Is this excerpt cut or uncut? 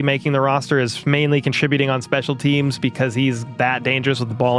uncut